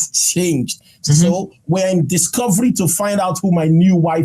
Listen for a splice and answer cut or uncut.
uncut